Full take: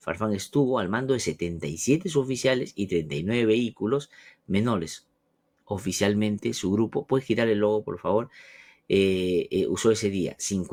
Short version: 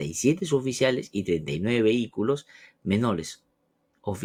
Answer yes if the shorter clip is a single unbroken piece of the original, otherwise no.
yes